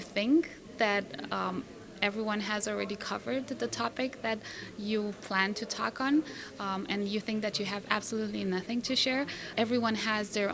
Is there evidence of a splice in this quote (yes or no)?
no